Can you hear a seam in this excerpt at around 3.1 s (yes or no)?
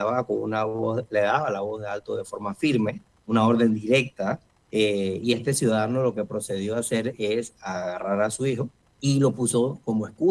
yes